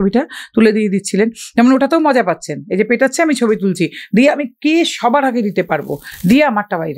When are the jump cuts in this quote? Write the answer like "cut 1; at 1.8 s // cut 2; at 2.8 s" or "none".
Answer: none